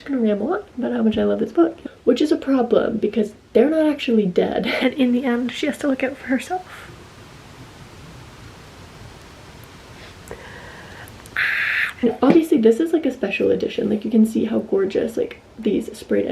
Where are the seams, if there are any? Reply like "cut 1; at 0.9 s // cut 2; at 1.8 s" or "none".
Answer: cut 1; at 1.8 s // cut 2; at 4.7 s // cut 3; at 12.0 s